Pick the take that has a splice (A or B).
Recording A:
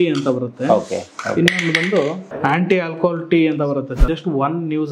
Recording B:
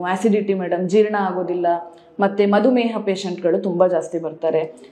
A